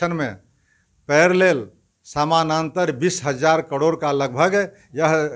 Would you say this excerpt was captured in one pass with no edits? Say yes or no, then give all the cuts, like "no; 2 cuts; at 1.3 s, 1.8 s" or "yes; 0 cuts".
yes; 0 cuts